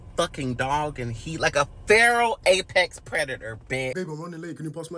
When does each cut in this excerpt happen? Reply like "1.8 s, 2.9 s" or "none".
3.9 s